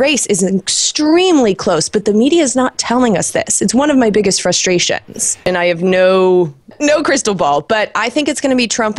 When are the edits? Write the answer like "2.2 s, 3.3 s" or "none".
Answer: 5.5 s, 6.7 s